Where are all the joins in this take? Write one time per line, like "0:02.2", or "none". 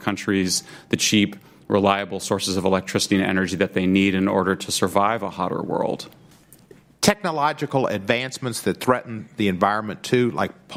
none